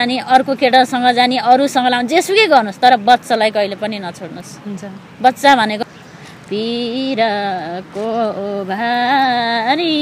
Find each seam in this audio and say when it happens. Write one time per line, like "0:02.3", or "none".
0:05.8